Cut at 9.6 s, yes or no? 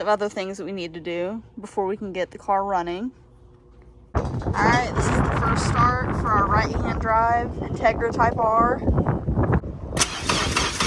yes